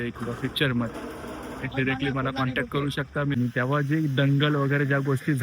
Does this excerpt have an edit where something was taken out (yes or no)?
yes